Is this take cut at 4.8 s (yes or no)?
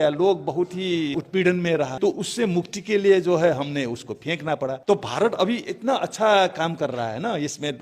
yes